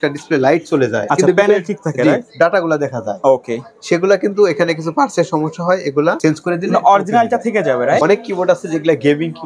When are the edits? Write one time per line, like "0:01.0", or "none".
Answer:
0:01.0
0:06.2
0:08.0